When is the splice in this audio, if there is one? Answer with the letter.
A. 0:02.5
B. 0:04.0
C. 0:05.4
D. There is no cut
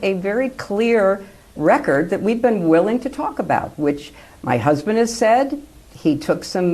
C